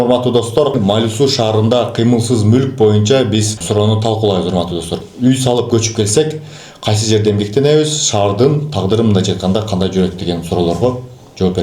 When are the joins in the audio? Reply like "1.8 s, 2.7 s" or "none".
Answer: 0.7 s, 3.6 s, 4.9 s